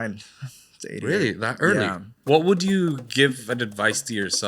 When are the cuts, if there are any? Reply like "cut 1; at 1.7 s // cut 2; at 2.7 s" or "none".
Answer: cut 1; at 2.1 s